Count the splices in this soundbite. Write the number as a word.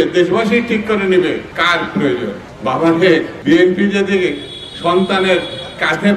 three